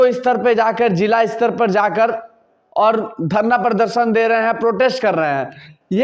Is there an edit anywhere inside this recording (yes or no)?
no